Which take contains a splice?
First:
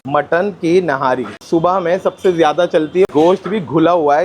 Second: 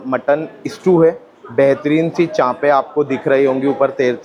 first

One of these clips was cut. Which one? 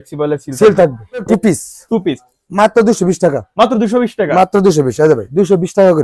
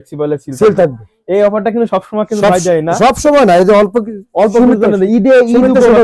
first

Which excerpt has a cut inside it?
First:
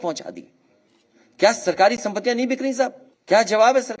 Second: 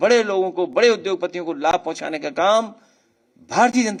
first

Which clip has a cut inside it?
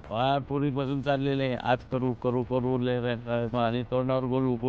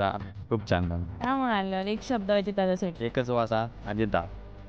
second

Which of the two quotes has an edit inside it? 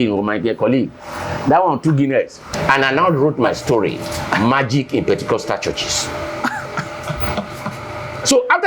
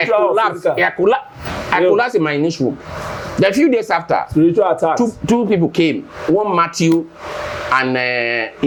first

